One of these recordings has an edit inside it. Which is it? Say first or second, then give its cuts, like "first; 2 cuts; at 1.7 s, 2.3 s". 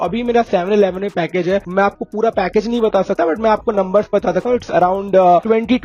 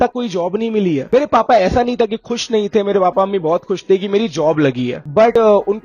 second; 1 cut; at 1.1 s